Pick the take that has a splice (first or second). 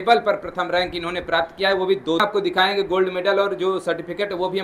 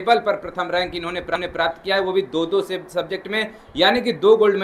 first